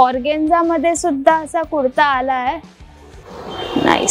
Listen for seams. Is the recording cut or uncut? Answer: uncut